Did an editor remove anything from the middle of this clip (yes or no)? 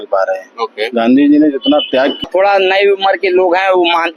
yes